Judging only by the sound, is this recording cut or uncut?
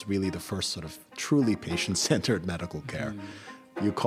uncut